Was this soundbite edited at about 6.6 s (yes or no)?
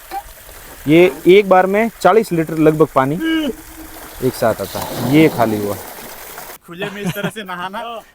yes